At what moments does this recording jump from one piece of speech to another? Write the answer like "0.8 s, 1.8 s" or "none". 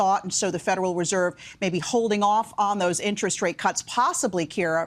none